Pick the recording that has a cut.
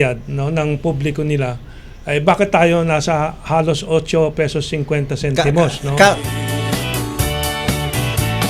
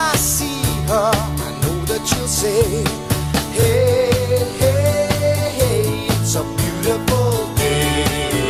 first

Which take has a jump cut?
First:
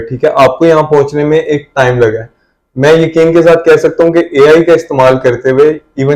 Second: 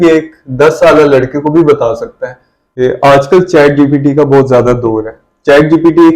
second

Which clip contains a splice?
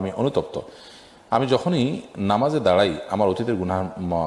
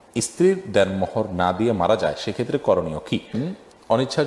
second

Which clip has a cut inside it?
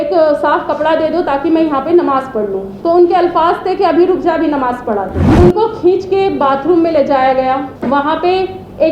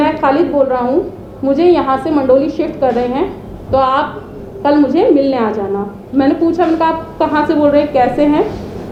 first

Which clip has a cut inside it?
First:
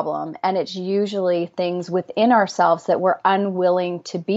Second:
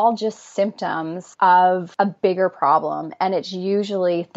second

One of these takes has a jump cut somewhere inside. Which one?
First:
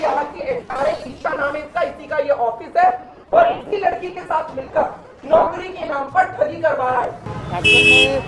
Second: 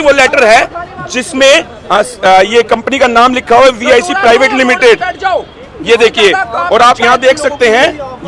first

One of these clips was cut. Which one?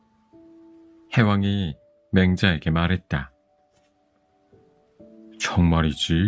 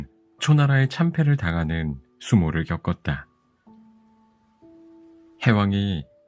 first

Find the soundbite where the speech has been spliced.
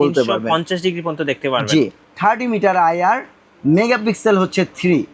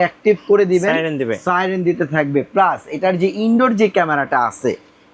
first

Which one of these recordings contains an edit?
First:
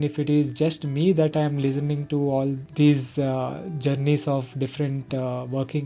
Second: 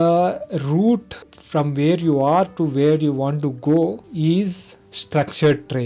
second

